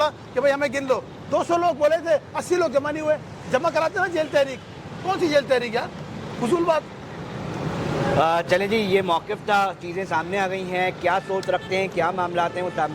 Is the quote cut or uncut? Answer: uncut